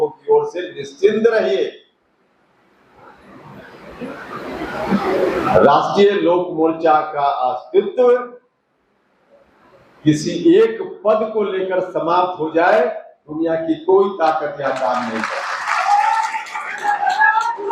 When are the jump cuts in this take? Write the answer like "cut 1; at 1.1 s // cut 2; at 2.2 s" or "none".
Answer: none